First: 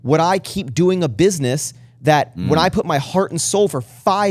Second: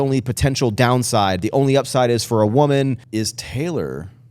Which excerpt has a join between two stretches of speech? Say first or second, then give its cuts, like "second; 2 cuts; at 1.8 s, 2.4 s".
second; 1 cut; at 3.0 s